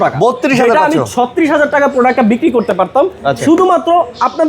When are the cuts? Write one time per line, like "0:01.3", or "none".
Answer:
none